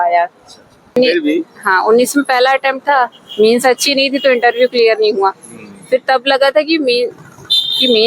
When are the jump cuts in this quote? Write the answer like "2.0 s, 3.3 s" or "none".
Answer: 0.9 s